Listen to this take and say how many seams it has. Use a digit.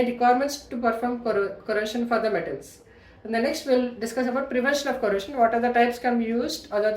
0